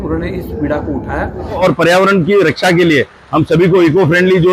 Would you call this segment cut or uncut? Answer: cut